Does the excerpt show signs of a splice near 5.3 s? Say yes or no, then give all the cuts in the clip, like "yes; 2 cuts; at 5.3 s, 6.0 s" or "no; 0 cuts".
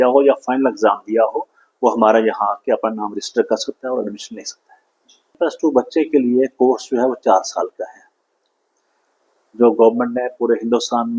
yes; 1 cut; at 5.3 s